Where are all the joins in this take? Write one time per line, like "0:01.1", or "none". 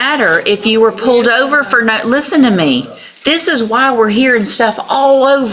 none